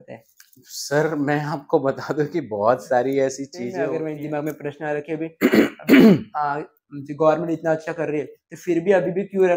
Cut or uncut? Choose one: cut